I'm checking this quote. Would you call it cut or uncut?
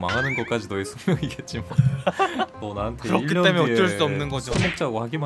cut